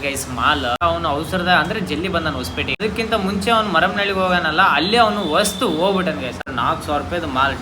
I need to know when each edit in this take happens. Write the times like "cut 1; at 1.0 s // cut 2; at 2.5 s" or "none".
cut 1; at 0.8 s // cut 2; at 2.8 s // cut 3; at 6.4 s